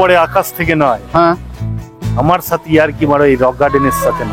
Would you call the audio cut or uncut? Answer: uncut